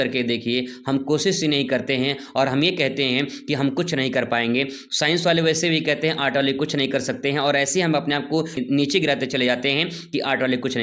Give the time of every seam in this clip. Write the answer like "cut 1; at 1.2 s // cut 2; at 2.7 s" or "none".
none